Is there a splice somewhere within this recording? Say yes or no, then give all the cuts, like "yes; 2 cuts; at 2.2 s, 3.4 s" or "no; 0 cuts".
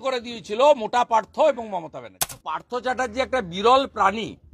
yes; 1 cut; at 2.5 s